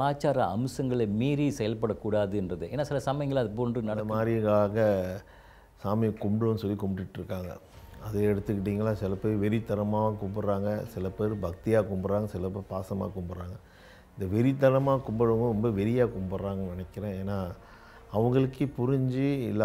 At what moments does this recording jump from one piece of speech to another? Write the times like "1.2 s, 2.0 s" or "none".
4.1 s